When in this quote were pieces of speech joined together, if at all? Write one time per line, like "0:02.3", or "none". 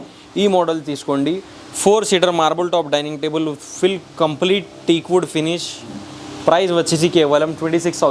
none